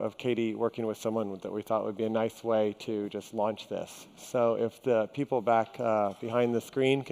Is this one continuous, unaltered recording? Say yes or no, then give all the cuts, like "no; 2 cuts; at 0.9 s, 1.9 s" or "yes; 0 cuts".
yes; 0 cuts